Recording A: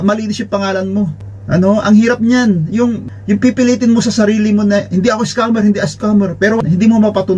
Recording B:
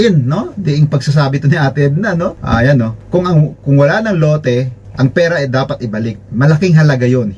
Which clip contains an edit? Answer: B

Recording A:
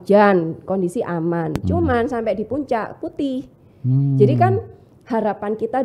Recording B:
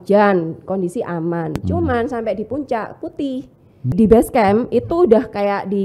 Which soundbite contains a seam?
B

